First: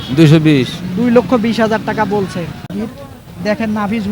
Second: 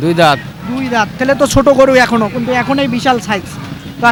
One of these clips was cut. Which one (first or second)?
first